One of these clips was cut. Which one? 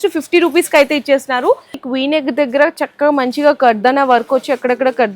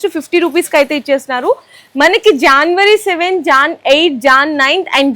first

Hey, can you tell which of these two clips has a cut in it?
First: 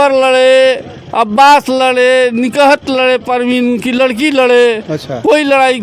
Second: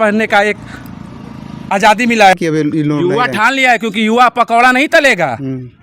second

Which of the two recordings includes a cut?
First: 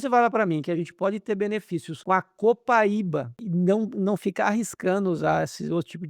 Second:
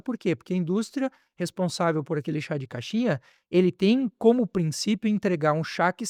first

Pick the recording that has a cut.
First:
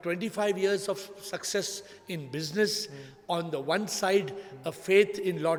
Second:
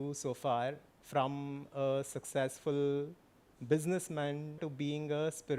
second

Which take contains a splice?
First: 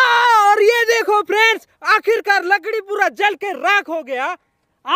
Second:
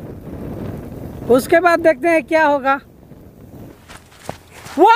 second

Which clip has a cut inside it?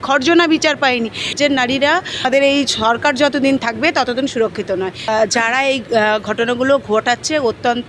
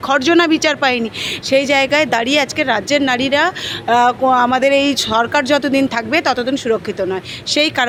first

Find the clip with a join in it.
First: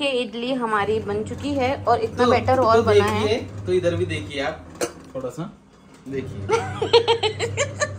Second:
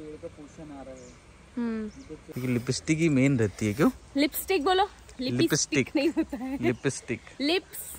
second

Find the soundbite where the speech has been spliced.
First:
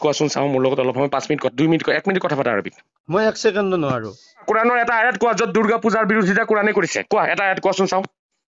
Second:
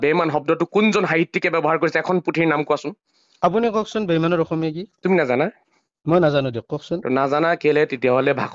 first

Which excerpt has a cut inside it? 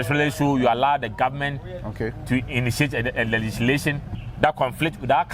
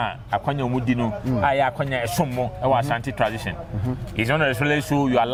first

